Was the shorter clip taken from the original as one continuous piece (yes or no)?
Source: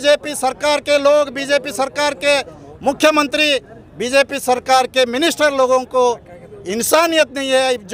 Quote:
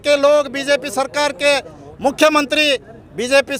yes